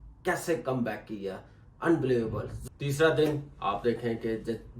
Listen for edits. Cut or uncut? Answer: cut